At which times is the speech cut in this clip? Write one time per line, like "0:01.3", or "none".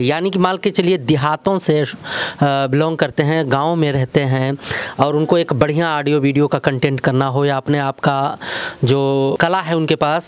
0:09.3